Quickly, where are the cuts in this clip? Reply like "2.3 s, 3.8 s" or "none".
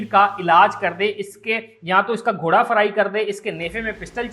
none